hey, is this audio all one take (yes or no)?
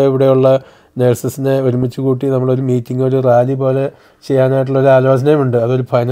yes